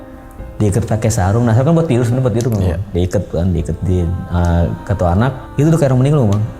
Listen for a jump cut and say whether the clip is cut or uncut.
cut